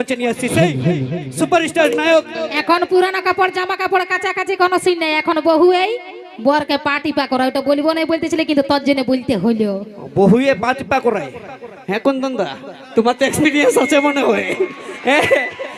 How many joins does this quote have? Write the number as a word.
one